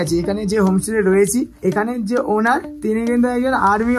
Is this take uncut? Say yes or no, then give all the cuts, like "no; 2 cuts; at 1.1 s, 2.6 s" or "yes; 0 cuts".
no; 2 cuts; at 1.5 s, 2.7 s